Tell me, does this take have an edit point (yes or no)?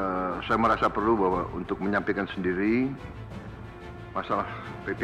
no